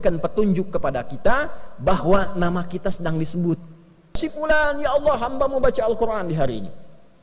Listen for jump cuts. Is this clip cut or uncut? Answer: cut